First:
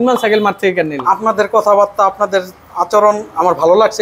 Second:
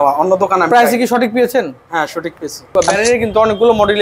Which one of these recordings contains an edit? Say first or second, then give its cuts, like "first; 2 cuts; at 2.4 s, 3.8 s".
second; 1 cut; at 2.7 s